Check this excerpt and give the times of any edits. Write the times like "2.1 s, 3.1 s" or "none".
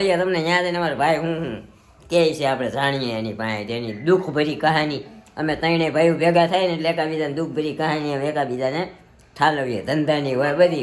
none